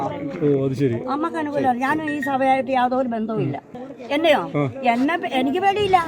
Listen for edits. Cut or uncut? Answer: cut